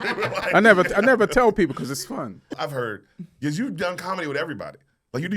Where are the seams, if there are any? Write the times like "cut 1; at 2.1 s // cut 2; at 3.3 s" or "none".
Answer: cut 1; at 2.4 s